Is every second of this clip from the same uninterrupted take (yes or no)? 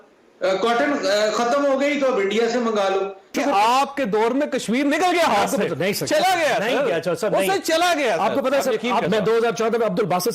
no